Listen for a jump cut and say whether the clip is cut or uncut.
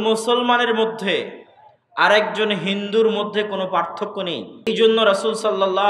cut